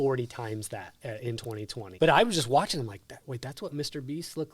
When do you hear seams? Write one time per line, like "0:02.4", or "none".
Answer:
0:01.8